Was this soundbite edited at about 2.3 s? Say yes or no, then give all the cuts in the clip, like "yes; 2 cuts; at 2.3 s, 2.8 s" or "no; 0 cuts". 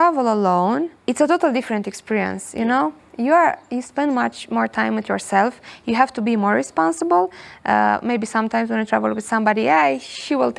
no; 1 cut; at 1.0 s